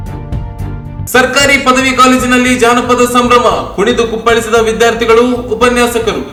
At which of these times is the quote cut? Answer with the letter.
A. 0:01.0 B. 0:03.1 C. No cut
C